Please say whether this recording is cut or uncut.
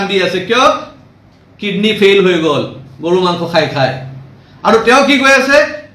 uncut